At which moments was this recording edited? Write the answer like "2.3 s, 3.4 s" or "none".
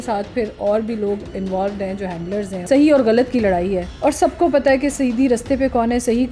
2.5 s, 3.9 s